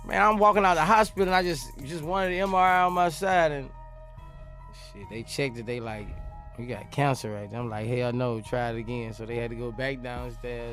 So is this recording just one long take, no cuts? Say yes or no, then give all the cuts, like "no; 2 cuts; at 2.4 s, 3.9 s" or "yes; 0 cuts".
yes; 0 cuts